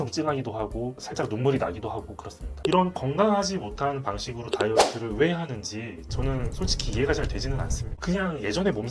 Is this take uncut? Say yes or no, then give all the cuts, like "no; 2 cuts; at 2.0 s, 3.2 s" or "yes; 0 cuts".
no; 1 cut; at 2.4 s